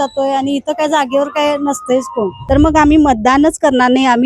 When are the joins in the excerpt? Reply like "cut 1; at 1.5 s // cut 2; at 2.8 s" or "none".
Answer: cut 1; at 2.4 s